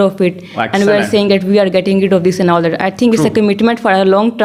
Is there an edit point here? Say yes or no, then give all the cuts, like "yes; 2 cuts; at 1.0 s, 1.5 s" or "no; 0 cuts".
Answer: no; 0 cuts